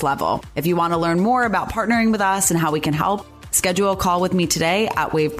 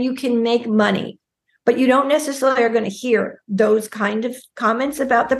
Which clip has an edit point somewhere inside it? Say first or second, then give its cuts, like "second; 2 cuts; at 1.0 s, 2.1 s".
second; 1 cut; at 4.4 s